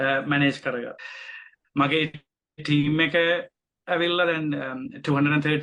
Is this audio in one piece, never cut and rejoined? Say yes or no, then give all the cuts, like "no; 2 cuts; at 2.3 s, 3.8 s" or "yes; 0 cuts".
no; 1 cut; at 1.0 s